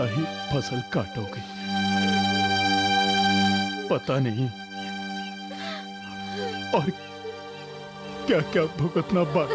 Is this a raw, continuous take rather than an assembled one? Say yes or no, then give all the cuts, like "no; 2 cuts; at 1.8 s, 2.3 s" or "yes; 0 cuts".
yes; 0 cuts